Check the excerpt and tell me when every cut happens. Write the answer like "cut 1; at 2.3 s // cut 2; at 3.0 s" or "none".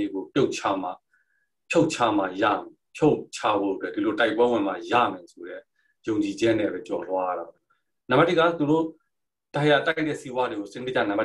cut 1; at 7.5 s